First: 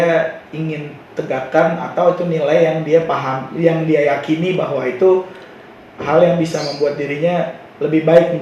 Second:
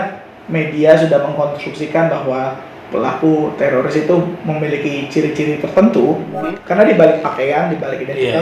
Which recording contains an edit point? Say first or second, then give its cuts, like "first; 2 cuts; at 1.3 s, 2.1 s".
second; 1 cut; at 6.3 s